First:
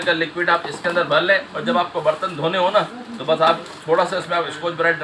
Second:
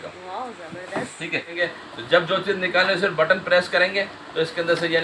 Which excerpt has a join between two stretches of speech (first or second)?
second